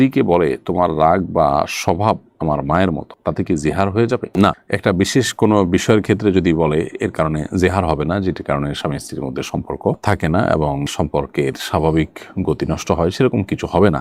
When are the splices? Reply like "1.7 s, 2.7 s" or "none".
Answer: none

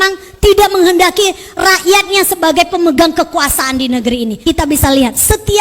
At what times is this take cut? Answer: 4.4 s

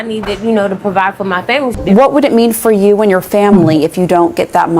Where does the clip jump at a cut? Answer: 1.8 s

